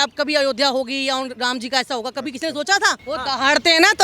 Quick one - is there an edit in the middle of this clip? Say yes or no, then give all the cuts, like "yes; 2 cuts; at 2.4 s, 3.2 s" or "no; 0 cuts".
yes; 1 cut; at 3.0 s